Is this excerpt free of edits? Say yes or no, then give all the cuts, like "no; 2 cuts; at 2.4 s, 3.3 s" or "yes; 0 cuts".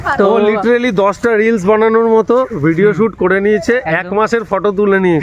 no; 1 cut; at 3.9 s